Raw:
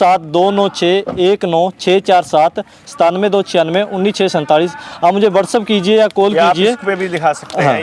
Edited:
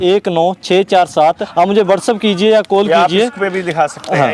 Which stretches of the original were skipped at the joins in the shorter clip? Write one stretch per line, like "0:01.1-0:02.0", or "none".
0:02.6-0:04.9

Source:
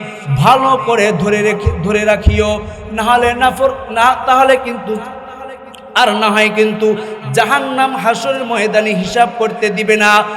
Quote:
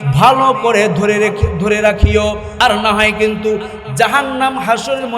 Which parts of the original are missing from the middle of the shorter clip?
0:02.7-0:05.8

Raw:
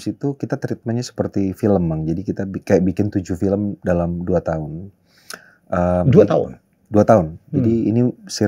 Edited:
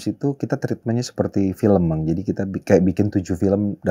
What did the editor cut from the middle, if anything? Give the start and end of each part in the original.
none

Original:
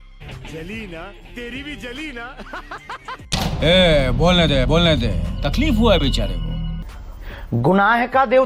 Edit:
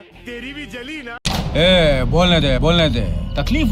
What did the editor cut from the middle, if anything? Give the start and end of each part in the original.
0:02.3-0:03.2

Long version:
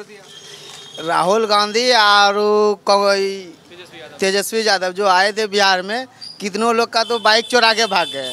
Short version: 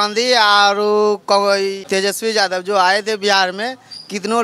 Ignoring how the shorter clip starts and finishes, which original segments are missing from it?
0:03.4-0:04.1

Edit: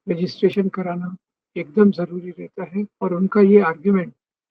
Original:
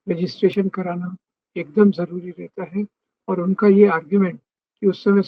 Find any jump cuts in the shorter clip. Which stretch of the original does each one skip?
0:02.9-0:03.2

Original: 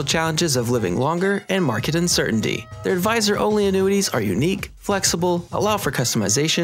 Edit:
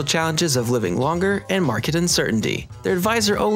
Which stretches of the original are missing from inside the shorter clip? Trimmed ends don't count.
none

